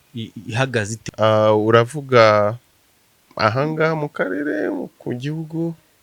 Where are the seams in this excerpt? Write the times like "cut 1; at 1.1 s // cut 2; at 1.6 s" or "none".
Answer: cut 1; at 1.0 s